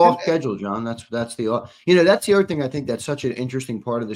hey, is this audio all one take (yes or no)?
yes